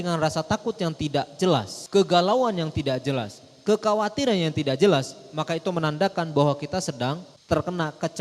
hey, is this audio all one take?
no; 2 cuts; at 1.8 s, 7.3 s

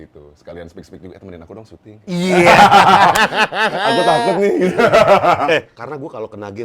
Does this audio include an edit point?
yes; 1 cut; at 5.8 s

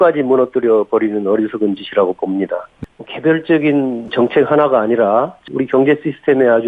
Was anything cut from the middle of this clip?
yes; 3 cuts; at 2.7 s, 4.1 s, 5.4 s

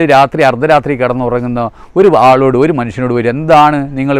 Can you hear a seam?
no; 0 cuts

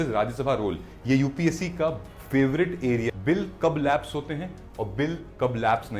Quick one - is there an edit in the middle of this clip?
yes; 1 cut; at 3.1 s

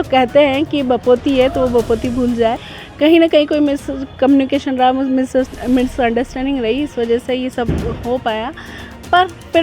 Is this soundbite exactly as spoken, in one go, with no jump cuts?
no; 1 cut; at 2.6 s

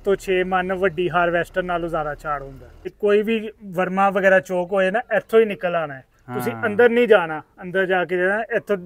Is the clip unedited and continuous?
no; 1 cut; at 2.9 s

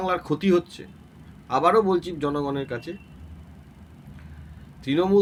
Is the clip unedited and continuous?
yes; 0 cuts

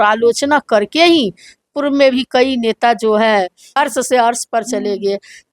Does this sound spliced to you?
yes; 1 cut; at 3.7 s

